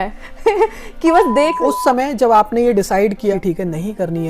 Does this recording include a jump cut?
yes; 2 cuts; at 1.5 s, 3.3 s

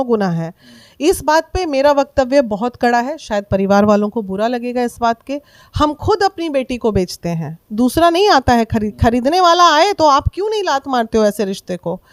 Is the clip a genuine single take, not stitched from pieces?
yes; 0 cuts

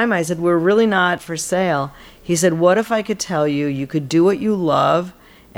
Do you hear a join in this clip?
yes; 1 cut; at 1.2 s

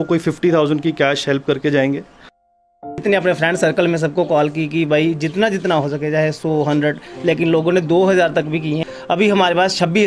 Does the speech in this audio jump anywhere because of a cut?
yes; 2 cuts; at 2.6 s, 8.8 s

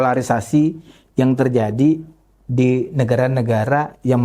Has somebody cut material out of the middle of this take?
no; 0 cuts

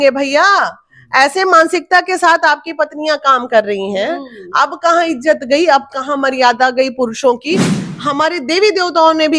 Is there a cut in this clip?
yes; 1 cut; at 7.8 s

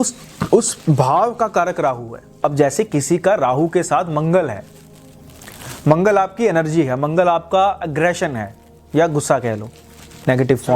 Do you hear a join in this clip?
yes; 1 cut; at 2.4 s

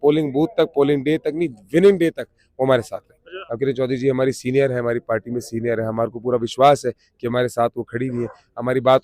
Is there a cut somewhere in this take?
yes; 1 cut; at 3.4 s

